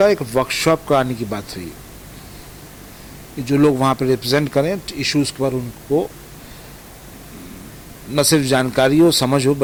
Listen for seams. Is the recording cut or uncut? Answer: uncut